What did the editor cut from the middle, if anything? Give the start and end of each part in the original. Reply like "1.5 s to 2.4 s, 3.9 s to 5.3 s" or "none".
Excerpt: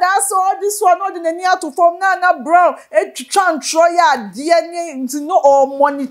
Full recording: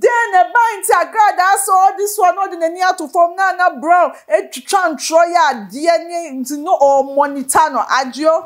none